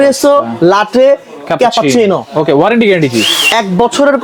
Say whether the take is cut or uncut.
uncut